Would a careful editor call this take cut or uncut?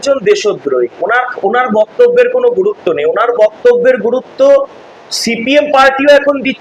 uncut